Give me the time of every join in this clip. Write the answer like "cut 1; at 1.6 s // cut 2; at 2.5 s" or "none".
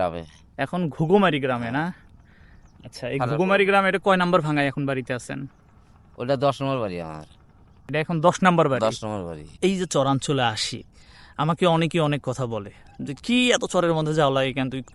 cut 1; at 9.6 s